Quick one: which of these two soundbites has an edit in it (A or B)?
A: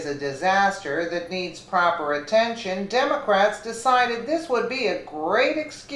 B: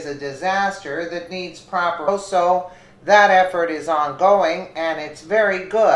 A